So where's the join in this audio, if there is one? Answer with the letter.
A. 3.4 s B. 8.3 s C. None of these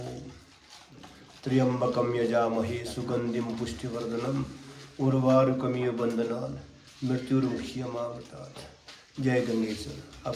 C